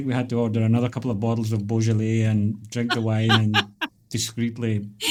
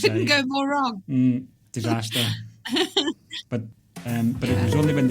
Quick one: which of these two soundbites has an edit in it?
second; 1 cut; at 3.7 s

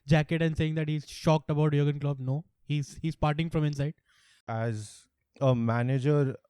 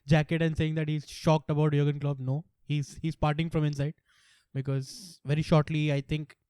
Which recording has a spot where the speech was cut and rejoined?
first; 1 cut; at 4.4 s

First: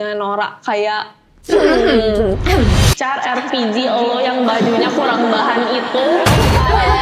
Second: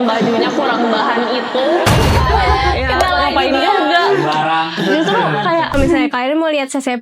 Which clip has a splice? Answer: second; 1 cut; at 5.7 s

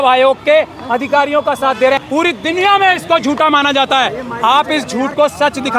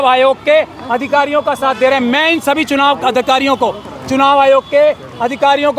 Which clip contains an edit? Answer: first; 1 cut; at 2.0 s

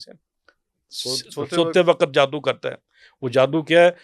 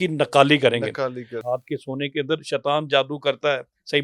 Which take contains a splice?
second; 1 cut; at 1.4 s

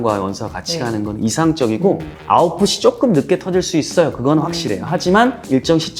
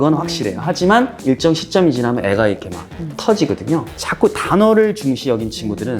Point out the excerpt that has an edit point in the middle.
second; 1 cut; at 3.9 s

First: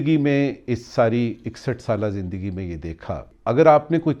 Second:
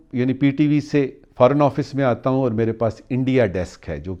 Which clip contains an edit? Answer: first; 1 cut; at 3.3 s

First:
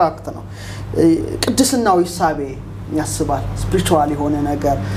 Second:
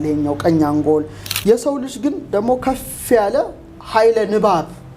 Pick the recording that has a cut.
second; 1 cut; at 1.2 s

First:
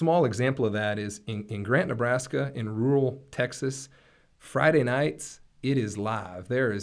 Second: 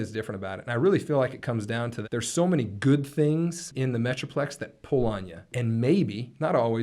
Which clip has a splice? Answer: second; 3 cuts; at 2.0 s, 3.7 s, 5.5 s

